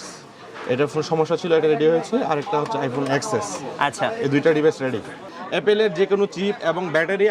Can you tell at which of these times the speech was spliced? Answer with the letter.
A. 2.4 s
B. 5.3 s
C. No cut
B